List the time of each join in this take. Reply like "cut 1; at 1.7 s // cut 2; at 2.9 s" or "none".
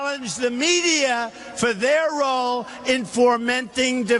cut 1; at 3.3 s